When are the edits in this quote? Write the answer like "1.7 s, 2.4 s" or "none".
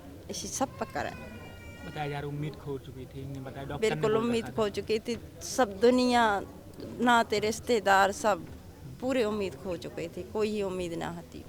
none